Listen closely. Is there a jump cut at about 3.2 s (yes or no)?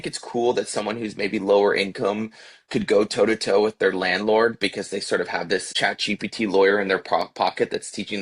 no